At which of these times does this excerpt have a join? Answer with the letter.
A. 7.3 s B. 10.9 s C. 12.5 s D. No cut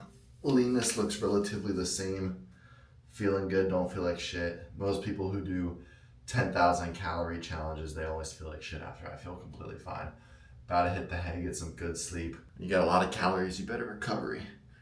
C